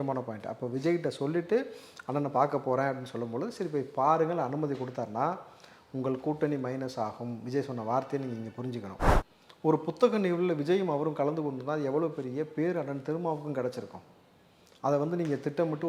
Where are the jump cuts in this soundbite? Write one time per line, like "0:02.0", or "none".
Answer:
0:09.1